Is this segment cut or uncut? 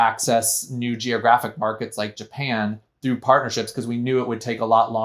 uncut